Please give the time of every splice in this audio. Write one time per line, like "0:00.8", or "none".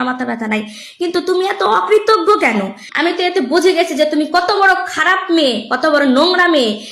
0:02.9